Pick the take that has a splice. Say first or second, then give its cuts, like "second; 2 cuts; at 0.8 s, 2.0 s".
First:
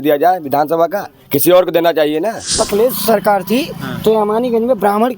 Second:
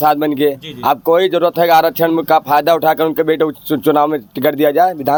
first; 1 cut; at 2.6 s